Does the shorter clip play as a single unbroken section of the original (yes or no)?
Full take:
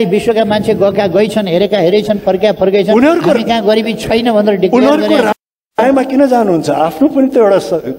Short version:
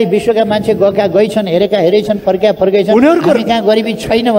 yes